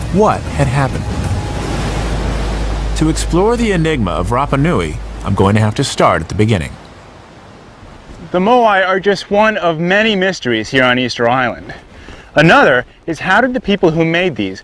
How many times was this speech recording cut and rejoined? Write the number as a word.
one